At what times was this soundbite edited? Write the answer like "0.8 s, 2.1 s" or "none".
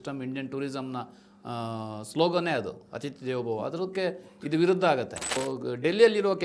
5.4 s